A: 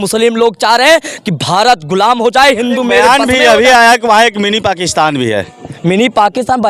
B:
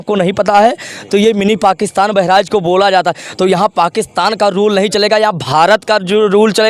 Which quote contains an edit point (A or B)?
A